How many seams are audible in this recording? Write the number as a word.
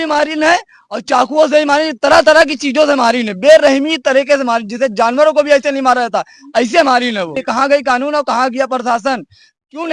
one